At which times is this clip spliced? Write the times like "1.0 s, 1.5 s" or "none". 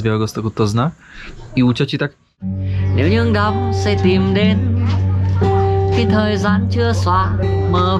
2.6 s

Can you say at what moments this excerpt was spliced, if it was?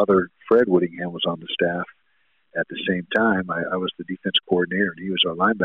none

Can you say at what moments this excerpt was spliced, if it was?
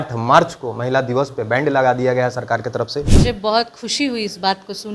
3.1 s

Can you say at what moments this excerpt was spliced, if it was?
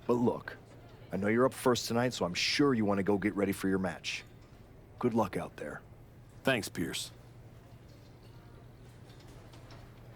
7.4 s, 9.3 s

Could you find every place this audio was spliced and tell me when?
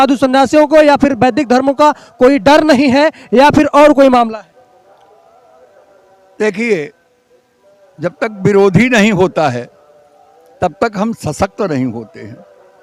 none

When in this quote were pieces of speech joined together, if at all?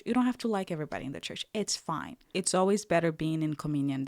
2.2 s

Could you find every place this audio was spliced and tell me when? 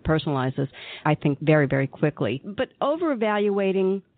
1.3 s, 2.6 s

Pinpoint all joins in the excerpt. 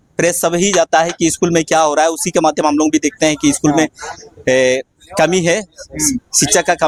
none

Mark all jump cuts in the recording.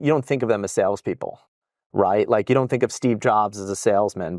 none

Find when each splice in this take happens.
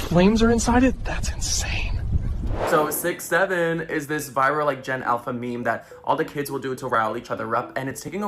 2.5 s

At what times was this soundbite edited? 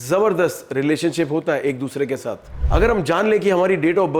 2.5 s

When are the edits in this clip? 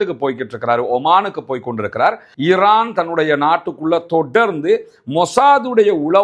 2.3 s

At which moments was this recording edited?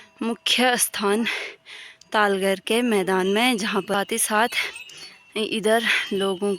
3.9 s

